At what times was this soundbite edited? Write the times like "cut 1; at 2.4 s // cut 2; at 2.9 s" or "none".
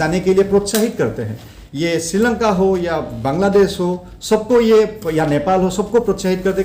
none

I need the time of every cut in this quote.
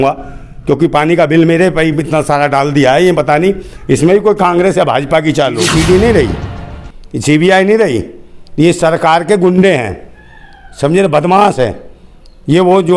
cut 1; at 5.6 s

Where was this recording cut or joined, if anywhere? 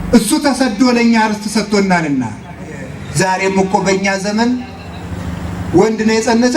cut 1; at 3.0 s

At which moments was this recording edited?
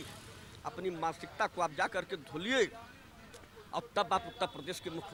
none

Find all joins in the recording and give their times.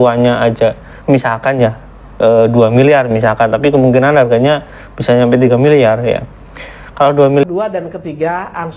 cut 1; at 7.4 s

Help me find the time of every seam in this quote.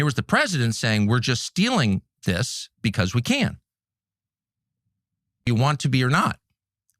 cut 1; at 5.5 s

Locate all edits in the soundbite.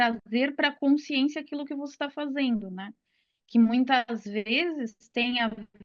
none

